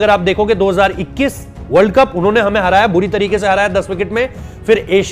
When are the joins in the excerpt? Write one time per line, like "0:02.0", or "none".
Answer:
none